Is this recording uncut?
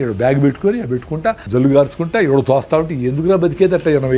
no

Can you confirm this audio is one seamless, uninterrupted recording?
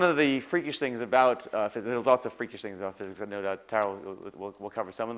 yes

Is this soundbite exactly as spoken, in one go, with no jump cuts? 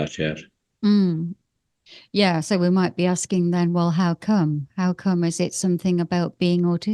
yes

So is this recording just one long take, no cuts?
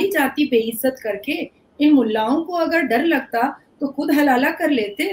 yes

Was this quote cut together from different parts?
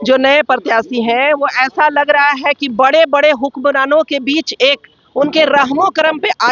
no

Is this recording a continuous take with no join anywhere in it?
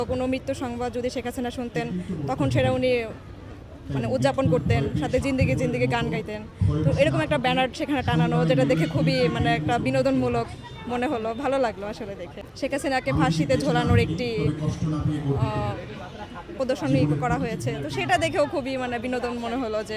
yes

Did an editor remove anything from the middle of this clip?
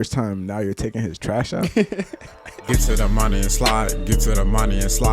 yes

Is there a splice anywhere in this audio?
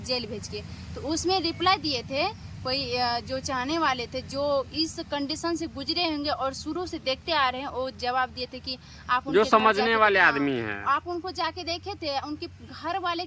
no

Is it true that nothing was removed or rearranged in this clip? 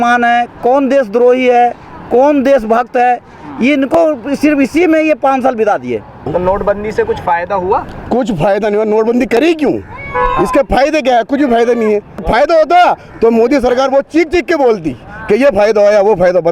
no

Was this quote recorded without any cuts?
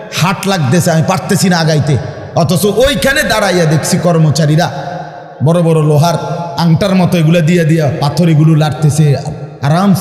yes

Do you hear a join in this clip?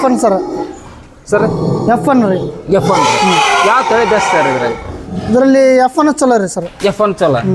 no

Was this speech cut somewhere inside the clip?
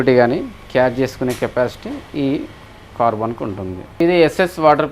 yes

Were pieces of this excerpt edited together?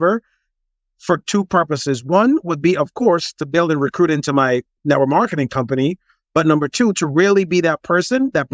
yes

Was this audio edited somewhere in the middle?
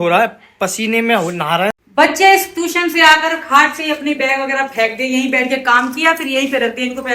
yes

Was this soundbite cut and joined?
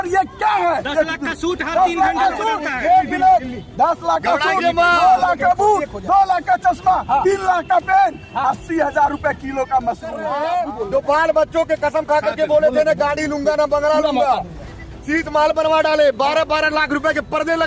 yes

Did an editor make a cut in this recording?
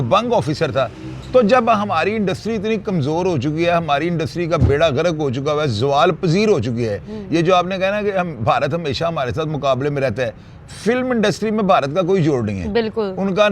no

